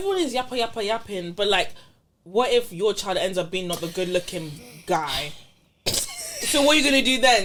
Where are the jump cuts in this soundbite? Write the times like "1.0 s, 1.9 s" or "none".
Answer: none